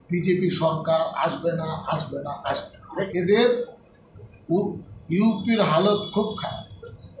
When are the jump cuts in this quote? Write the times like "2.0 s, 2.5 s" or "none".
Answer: 3.1 s